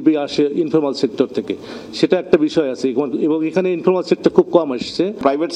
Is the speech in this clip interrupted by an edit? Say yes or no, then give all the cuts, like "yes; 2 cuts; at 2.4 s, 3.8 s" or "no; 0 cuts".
no; 0 cuts